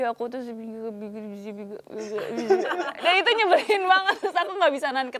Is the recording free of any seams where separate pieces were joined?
yes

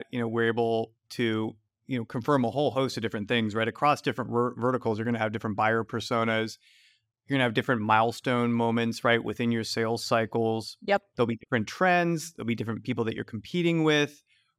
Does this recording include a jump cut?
no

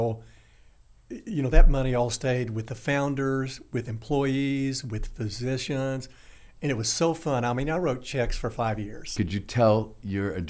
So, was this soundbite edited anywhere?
yes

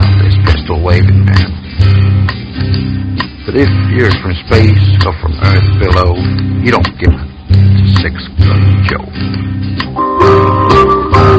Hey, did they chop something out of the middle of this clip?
yes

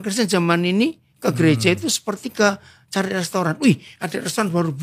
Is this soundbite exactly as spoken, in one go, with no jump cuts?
yes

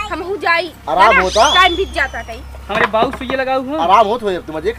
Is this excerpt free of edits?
yes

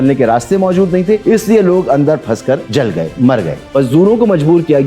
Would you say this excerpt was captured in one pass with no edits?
no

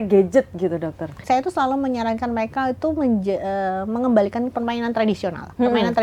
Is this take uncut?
no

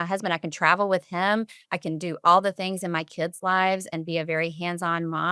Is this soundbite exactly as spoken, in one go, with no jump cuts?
yes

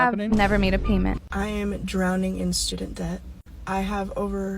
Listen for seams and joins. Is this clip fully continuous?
no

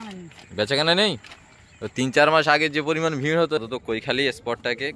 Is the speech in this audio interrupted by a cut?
yes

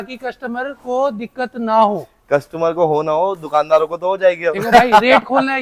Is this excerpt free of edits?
yes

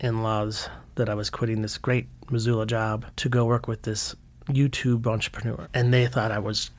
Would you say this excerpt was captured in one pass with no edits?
no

